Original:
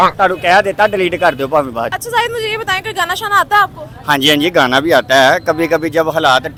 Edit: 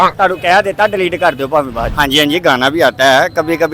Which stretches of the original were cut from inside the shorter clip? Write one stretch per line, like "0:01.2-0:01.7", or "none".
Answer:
0:01.9-0:04.0